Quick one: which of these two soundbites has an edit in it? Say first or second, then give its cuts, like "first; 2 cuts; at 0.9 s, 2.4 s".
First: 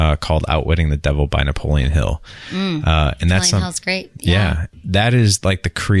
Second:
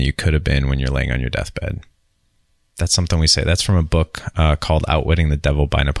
first; 1 cut; at 4.7 s